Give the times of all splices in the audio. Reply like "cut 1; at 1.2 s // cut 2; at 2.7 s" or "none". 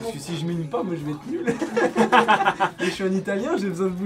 none